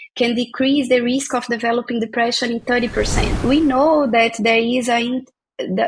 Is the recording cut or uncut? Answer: cut